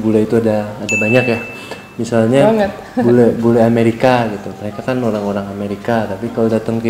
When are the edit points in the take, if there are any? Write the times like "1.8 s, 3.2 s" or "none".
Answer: none

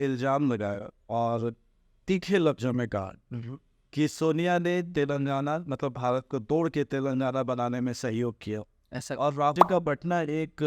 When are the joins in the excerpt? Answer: 9.5 s

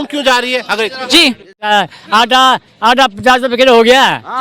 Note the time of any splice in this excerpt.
1.7 s

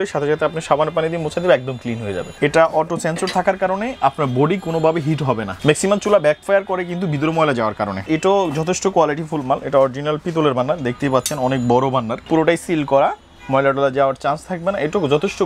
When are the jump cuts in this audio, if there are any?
2.2 s, 5.5 s, 8.0 s, 12.2 s

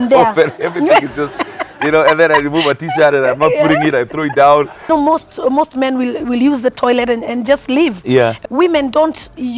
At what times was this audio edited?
4.9 s, 8.4 s

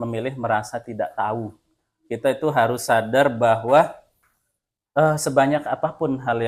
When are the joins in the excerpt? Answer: none

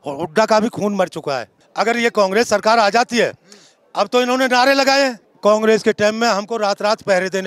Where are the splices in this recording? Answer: 1.6 s, 5.3 s

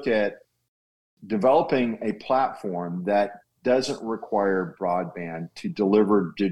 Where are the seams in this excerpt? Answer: 0.9 s

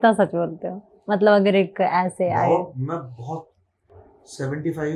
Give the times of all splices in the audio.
none

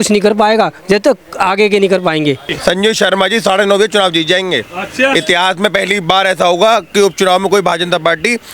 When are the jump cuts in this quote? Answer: 2.5 s

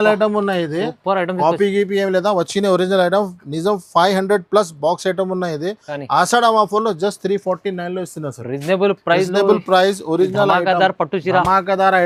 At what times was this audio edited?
none

